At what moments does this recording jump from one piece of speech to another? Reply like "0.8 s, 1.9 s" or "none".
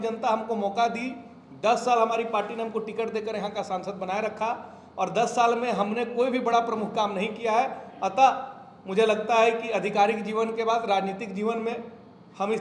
none